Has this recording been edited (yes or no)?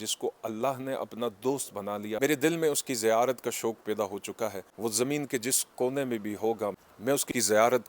yes